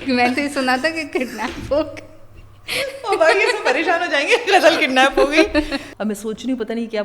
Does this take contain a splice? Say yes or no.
yes